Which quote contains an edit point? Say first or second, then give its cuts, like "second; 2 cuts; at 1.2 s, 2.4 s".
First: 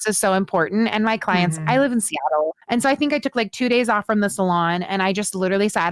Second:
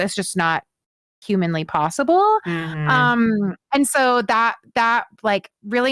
first; 1 cut; at 2.6 s